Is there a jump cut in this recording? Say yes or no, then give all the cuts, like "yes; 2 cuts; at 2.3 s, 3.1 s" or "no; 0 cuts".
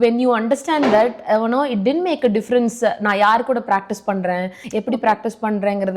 yes; 1 cut; at 4.6 s